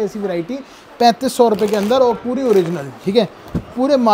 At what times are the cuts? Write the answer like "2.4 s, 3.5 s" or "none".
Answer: none